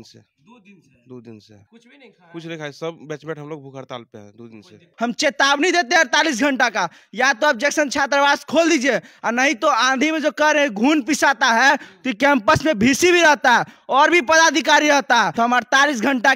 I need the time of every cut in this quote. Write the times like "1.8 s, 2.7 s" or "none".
1.5 s, 4.9 s, 15.3 s